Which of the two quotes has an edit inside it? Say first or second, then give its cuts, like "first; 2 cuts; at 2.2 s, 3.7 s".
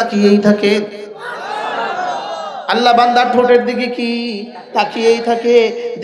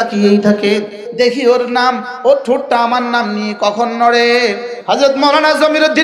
second; 2 cuts; at 1.0 s, 4.7 s